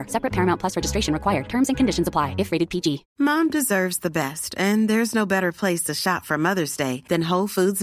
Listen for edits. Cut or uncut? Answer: cut